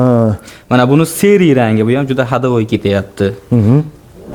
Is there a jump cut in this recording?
no; 0 cuts

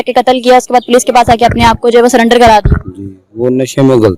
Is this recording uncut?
yes; 0 cuts

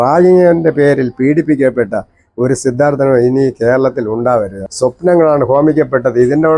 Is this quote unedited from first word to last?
no; 1 cut; at 4.6 s

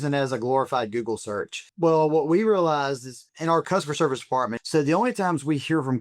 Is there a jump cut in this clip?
yes; 3 cuts; at 1.6 s, 3.6 s, 4.6 s

